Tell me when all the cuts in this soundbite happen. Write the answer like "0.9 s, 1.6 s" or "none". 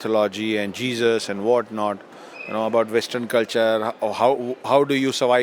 none

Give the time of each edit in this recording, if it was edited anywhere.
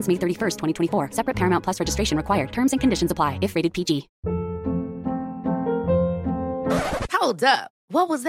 4.1 s

